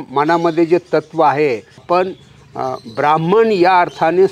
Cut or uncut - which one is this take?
cut